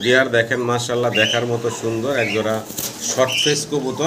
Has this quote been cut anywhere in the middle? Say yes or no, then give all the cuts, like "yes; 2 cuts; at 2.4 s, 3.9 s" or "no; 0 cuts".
no; 0 cuts